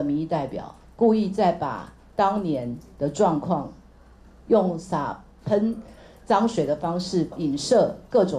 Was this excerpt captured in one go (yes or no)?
no